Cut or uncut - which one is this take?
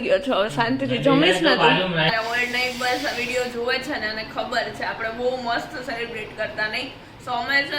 cut